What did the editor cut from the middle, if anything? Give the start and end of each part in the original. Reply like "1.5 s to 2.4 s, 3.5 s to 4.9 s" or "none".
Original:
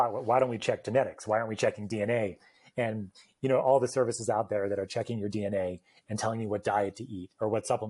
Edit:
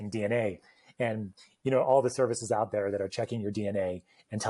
none

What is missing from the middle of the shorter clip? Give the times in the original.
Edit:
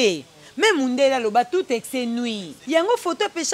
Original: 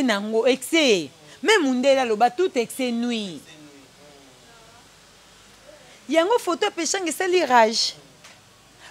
3.4 s to 5.9 s

